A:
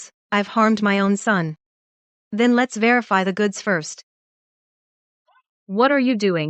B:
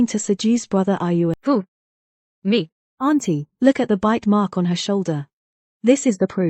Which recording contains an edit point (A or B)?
B